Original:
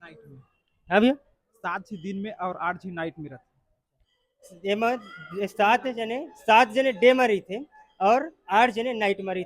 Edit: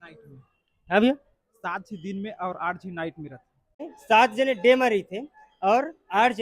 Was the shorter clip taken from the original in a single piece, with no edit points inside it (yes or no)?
no